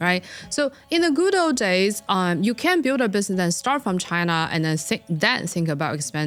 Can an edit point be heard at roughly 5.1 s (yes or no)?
no